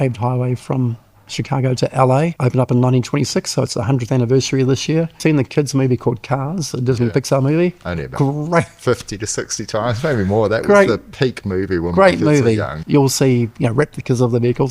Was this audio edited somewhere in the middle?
yes; 3 cuts; at 2.4 s, 5.2 s, 12.8 s

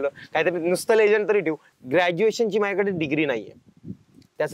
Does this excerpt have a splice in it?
yes; 1 cut; at 1.6 s

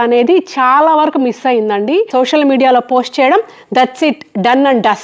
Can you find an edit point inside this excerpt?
yes; 1 cut; at 2.1 s

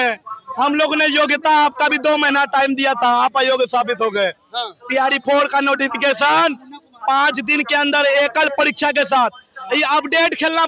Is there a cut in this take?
no; 0 cuts

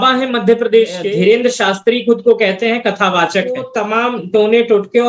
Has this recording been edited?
yes; 2 cuts; at 1.0 s, 3.7 s

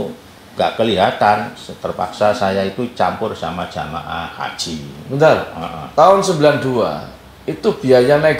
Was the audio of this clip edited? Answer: no; 0 cuts

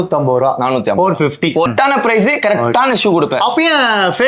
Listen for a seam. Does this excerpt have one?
yes; 1 cut; at 1.7 s

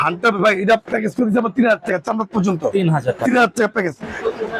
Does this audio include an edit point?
no; 0 cuts

